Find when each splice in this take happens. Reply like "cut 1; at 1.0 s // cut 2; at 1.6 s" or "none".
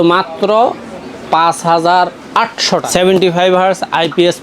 cut 1; at 2.8 s